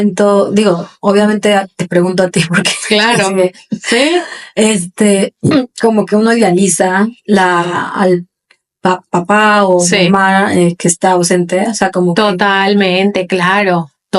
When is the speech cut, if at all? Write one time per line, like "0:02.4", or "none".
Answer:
none